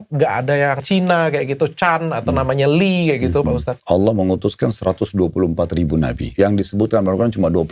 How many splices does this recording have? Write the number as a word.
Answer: three